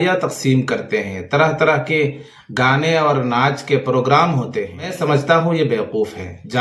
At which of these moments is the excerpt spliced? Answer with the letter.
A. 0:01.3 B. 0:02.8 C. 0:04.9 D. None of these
C